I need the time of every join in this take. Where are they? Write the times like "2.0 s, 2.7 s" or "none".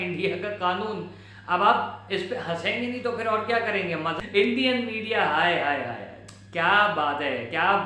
4.2 s